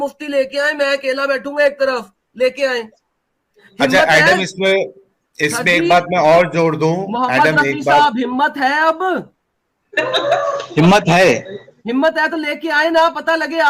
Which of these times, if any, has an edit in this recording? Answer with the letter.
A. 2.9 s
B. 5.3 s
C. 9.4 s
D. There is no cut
D